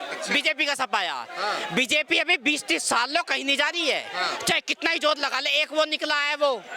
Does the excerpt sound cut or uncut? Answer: uncut